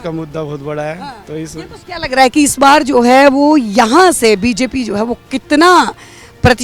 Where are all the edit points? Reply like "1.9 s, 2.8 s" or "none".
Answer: 1.8 s